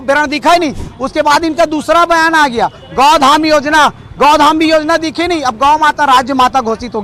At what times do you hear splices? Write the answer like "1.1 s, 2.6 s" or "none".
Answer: none

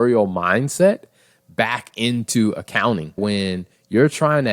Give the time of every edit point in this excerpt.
3.2 s

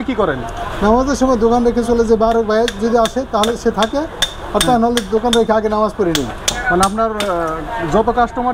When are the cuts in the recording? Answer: none

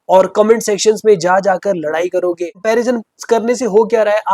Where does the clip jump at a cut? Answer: 2.6 s

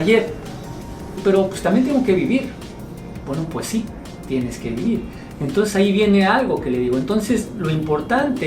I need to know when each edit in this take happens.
1.2 s

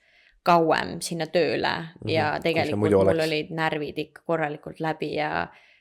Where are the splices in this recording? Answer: none

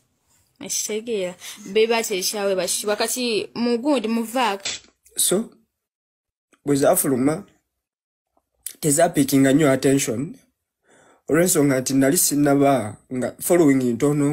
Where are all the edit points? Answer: 4.7 s

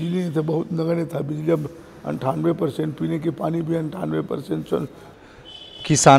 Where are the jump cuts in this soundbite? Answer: 5.0 s

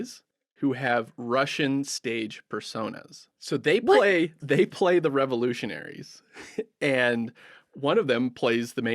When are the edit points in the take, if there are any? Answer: 3.3 s

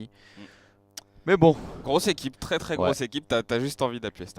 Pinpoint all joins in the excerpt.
2.3 s

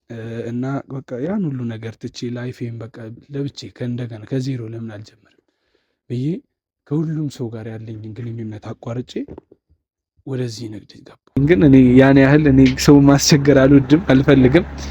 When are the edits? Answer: 11.4 s

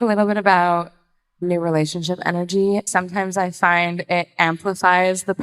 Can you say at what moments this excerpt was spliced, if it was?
1.4 s, 2.9 s

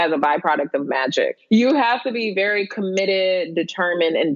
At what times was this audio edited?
1.4 s

